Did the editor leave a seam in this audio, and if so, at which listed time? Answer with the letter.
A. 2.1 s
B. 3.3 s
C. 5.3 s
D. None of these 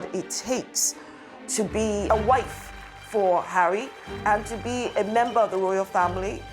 A